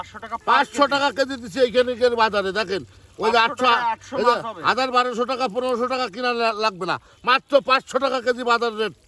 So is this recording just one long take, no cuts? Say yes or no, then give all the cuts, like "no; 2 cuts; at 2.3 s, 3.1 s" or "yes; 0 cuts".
yes; 0 cuts